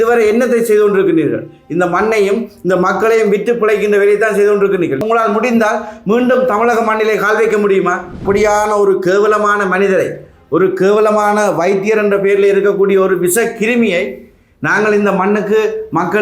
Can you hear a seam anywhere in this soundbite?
yes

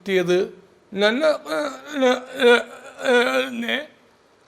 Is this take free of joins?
yes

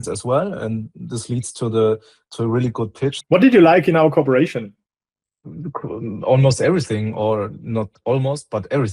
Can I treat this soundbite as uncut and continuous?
no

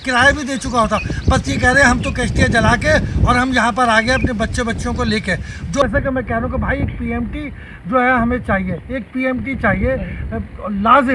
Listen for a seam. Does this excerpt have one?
yes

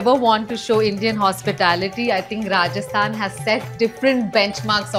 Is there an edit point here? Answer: no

